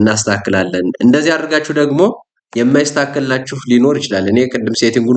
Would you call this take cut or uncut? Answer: uncut